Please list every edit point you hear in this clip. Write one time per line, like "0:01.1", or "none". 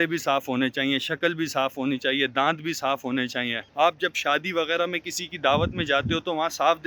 none